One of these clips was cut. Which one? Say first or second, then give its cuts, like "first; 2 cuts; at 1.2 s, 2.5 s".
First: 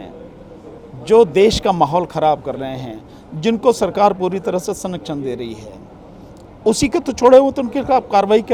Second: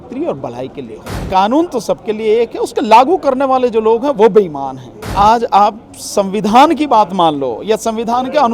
second; 2 cuts; at 1.2 s, 5.1 s